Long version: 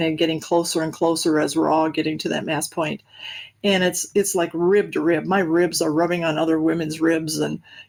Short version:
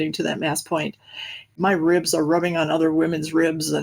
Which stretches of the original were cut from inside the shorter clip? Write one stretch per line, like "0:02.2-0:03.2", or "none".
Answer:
0:03.6-0:05.2